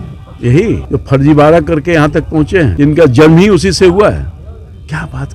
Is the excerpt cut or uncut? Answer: cut